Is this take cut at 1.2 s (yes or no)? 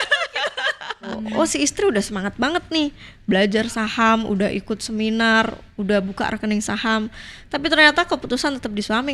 yes